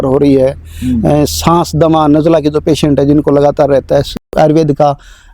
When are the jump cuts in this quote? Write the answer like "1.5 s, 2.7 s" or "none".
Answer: 4.3 s

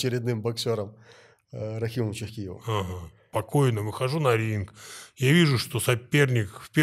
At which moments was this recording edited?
3.2 s

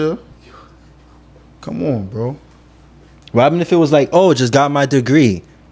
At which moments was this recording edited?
none

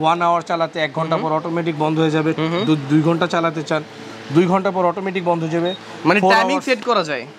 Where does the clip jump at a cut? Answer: none

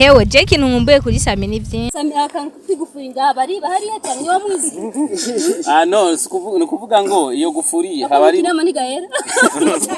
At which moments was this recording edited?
1.9 s

